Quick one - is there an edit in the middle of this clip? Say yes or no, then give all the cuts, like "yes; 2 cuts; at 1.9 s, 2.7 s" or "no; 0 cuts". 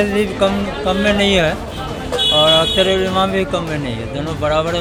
no; 0 cuts